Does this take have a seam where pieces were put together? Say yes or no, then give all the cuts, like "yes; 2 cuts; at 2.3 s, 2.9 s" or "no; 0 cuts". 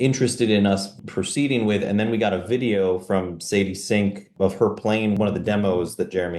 yes; 1 cut; at 5.1 s